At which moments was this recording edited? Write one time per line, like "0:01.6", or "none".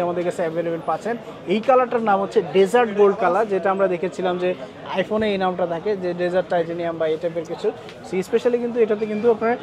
none